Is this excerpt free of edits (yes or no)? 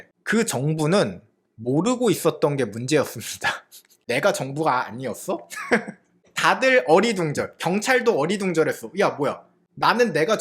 no